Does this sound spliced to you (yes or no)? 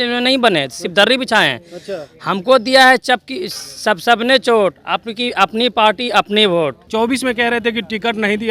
yes